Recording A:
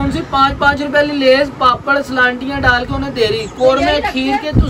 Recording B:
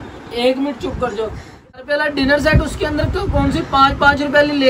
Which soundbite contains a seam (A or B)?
B